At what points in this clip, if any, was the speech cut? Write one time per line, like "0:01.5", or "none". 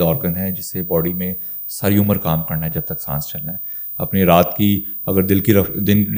none